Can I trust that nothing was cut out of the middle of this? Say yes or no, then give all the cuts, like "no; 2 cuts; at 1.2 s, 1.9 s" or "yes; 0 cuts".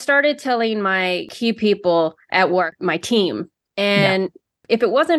no; 2 cuts; at 1.3 s, 2.2 s